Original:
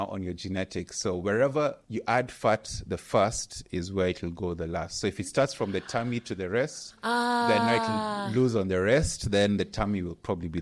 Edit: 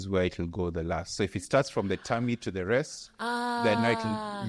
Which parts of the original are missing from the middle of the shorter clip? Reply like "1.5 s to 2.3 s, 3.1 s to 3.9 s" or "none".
none